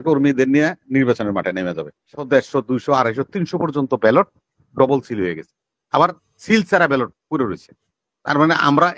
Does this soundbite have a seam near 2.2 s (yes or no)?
yes